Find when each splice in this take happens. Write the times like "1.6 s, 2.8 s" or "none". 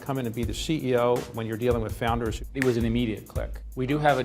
2.3 s